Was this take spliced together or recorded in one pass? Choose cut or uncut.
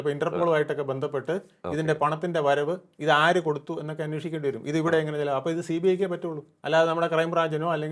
uncut